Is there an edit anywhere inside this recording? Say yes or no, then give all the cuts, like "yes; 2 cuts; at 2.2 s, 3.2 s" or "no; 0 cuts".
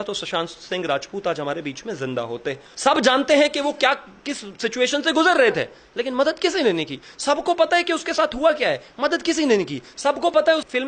yes; 1 cut; at 2.7 s